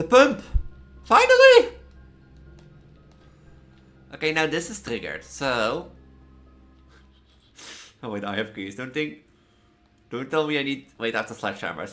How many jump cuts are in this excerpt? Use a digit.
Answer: 1